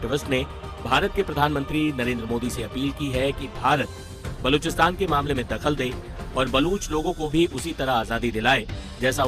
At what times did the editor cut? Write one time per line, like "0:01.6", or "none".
none